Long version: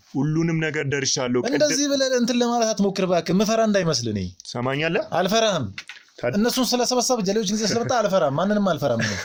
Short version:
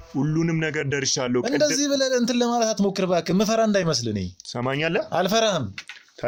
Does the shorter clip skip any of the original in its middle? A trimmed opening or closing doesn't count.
no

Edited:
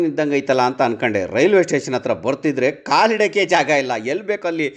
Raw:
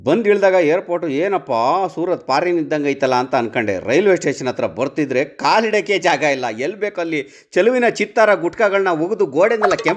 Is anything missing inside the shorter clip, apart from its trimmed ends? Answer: no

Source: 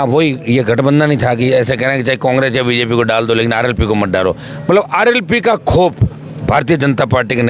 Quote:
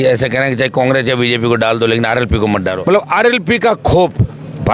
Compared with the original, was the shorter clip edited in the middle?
yes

